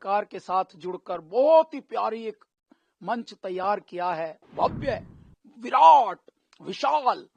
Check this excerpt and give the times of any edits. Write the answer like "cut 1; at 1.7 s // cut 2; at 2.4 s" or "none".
cut 1; at 4.4 s

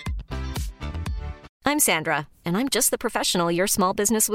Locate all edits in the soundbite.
cut 1; at 1.5 s

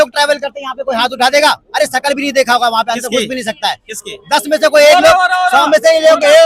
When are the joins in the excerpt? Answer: none

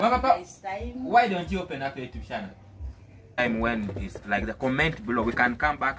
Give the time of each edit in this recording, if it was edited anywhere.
cut 1; at 3.4 s

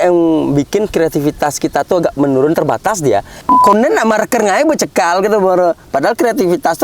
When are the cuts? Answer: cut 1; at 3.4 s

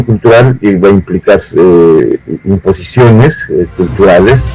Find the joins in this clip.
none

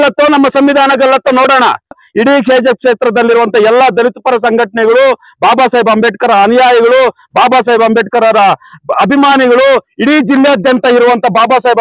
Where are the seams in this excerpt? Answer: cut 1; at 2.0 s

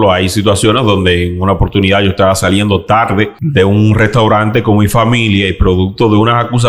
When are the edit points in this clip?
cut 1; at 3.4 s

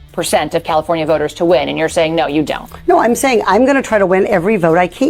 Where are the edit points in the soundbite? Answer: none

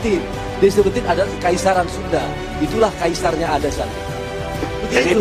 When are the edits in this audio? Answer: none

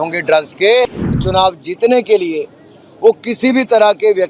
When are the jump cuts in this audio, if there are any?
cut 1; at 1.2 s

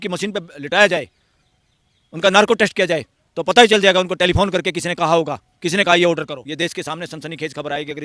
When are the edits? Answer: cut 1; at 6.4 s

